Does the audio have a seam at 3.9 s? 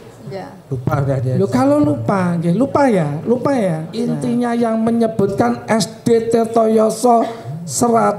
yes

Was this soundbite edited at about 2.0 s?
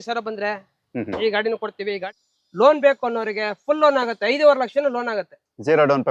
yes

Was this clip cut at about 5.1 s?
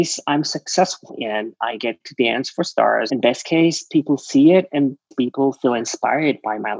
yes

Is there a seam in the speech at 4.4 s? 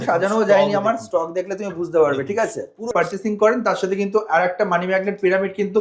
no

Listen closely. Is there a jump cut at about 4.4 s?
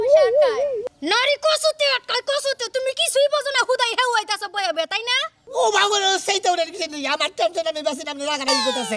no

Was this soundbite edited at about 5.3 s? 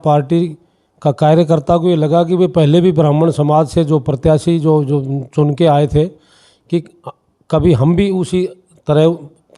no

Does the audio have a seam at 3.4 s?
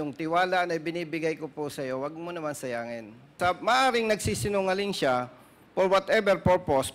yes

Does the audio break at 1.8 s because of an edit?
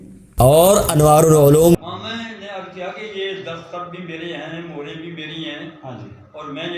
yes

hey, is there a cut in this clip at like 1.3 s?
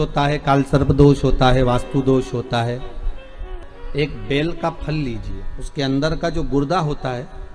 no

